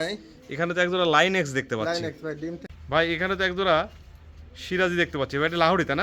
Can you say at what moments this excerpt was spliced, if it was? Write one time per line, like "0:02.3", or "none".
0:02.7